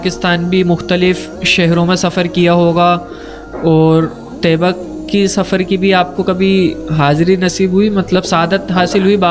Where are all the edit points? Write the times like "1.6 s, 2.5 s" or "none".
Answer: none